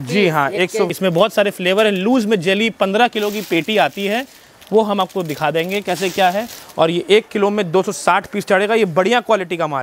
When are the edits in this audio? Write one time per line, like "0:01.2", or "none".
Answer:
0:00.9